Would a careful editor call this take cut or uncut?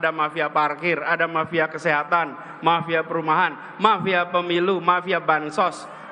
uncut